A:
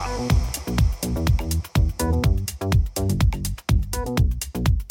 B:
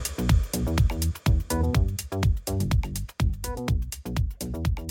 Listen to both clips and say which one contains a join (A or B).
A